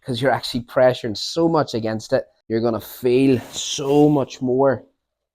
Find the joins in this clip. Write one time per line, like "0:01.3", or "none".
0:02.4